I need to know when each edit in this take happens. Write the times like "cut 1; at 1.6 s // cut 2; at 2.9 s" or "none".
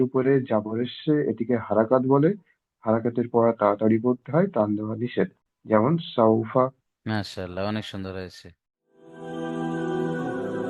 cut 1; at 9.2 s